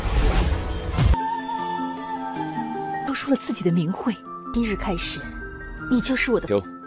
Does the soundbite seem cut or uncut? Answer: uncut